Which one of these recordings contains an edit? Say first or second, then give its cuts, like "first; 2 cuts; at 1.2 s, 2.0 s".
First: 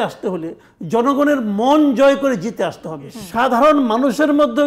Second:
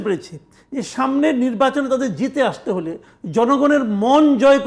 first; 1 cut; at 3.2 s